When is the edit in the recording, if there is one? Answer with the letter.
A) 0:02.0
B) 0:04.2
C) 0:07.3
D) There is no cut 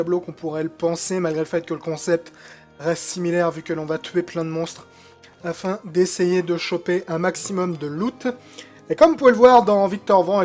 B